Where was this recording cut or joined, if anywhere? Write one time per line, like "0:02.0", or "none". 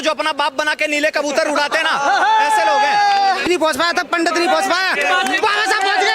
0:03.5

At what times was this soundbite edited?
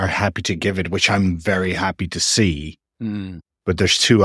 0:03.3

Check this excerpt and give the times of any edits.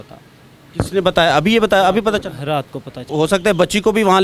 0:03.0

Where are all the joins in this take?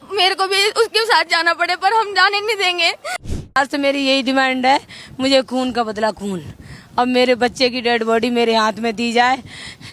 0:03.6

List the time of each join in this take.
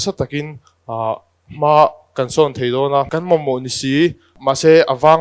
0:03.1

